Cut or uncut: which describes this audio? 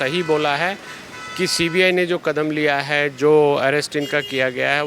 uncut